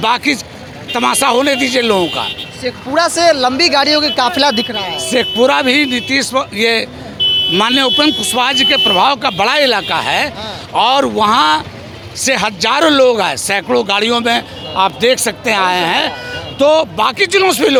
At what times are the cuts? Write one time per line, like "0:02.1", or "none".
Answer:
none